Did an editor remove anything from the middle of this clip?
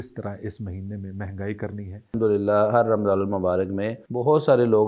yes; 2 cuts; at 2.2 s, 4.0 s

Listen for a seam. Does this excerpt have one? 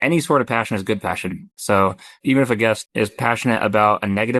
no; 0 cuts

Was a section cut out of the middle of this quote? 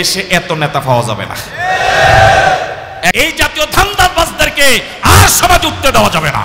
yes; 1 cut; at 3.1 s

